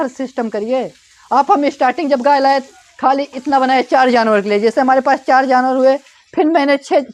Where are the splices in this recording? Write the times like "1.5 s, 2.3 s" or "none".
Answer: none